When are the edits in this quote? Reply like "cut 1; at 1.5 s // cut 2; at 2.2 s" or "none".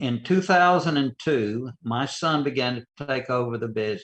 cut 1; at 1.8 s